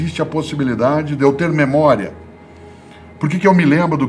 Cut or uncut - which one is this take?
uncut